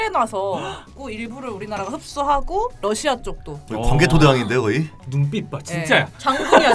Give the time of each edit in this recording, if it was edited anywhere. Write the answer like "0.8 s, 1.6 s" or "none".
1.0 s, 5.0 s